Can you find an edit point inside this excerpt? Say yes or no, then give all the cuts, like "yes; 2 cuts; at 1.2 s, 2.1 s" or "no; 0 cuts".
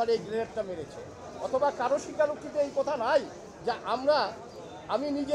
no; 0 cuts